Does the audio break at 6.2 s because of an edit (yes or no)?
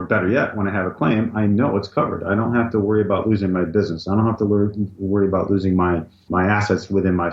yes